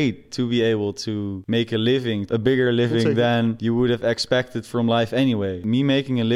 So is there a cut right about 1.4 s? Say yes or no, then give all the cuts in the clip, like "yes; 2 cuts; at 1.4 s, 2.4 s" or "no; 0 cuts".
yes; 4 cuts; at 1.4 s, 2.3 s, 3.6 s, 5.6 s